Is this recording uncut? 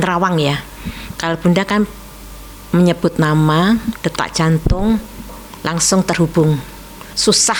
yes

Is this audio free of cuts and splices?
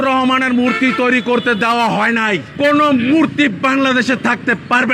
no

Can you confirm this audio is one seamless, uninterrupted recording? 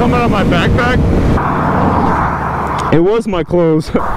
no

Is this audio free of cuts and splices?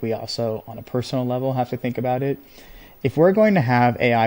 yes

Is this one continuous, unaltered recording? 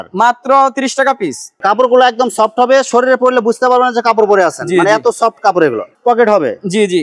no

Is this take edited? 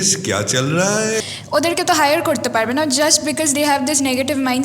yes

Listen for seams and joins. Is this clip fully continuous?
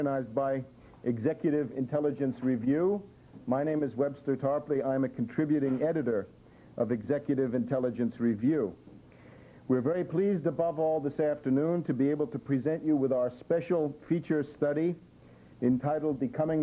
yes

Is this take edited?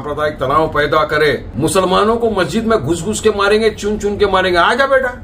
yes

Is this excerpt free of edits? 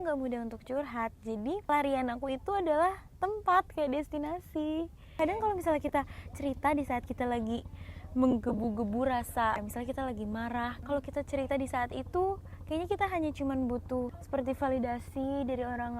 no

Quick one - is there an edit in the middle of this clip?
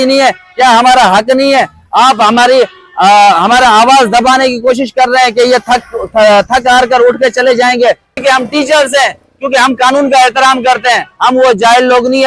yes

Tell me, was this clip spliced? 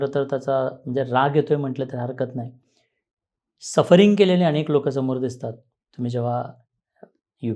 no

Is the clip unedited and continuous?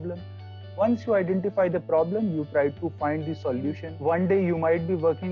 no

